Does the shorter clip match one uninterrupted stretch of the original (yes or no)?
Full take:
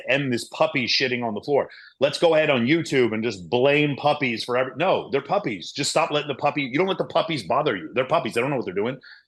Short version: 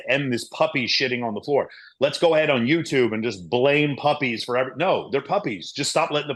yes